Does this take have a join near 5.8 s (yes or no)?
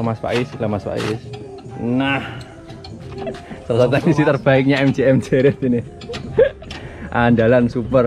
no